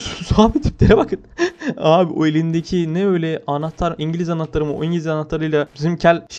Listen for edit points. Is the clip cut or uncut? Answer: uncut